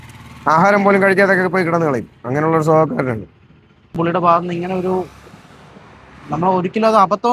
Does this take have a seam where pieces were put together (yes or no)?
yes